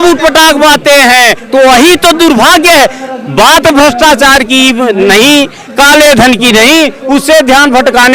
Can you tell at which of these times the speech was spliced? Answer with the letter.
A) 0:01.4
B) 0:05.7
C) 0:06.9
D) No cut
A